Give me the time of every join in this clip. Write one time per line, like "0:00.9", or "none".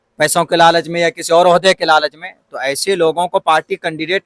none